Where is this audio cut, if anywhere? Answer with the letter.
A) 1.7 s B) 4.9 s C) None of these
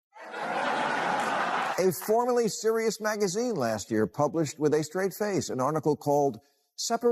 A